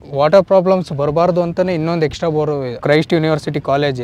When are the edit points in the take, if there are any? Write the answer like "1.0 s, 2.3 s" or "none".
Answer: 2.8 s